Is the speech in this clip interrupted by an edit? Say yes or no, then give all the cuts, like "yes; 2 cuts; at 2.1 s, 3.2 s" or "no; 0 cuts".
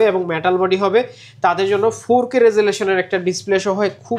no; 0 cuts